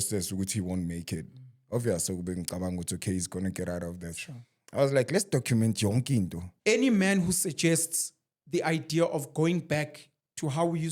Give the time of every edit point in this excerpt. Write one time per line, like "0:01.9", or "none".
0:06.5

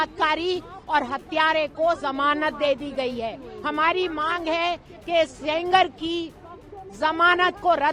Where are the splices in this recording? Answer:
none

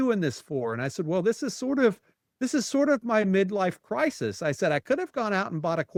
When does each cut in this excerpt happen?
none

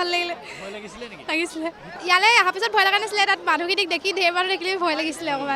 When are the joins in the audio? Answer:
0:01.8

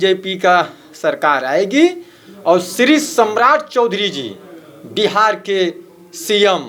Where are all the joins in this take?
none

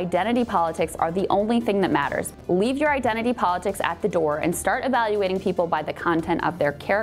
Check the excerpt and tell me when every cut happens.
0:02.3

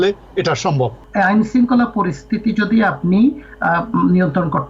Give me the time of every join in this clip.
0:01.0

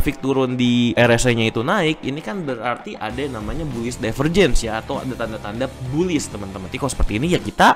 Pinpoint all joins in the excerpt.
none

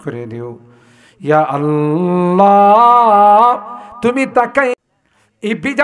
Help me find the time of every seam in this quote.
0:04.7

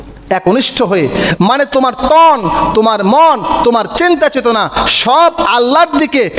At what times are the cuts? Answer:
none

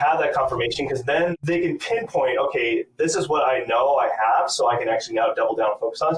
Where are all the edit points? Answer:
0:01.3

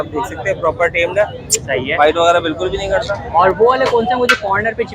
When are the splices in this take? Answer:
0:03.2

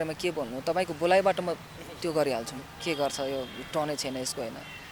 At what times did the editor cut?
0:02.7

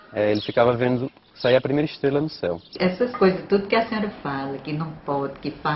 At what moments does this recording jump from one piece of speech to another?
0:02.7

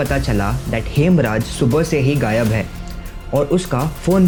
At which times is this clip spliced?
none

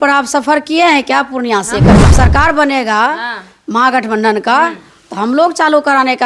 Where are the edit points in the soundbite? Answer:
0:02.1

